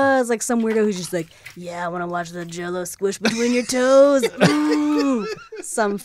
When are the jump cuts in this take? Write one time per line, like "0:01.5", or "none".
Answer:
none